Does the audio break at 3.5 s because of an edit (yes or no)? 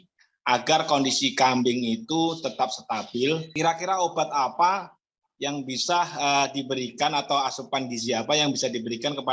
yes